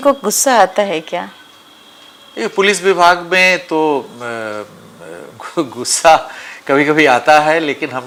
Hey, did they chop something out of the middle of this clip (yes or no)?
no